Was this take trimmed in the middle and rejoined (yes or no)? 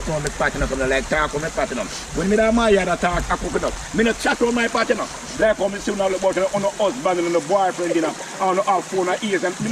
yes